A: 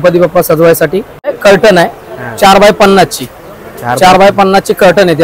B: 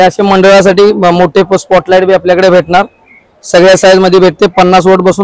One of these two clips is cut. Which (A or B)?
A